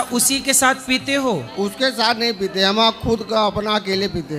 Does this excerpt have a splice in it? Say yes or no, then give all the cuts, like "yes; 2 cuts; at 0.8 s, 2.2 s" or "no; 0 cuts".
no; 0 cuts